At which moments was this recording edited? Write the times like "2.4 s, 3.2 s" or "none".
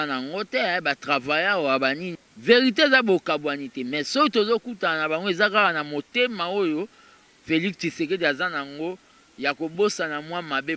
2.1 s